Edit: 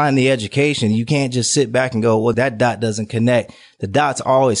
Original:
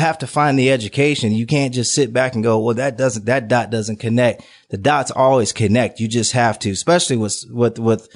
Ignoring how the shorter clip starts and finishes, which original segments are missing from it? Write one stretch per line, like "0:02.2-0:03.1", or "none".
0:02.7-0:03.2